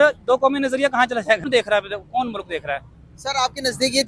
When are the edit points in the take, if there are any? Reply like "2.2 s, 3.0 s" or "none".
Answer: 1.4 s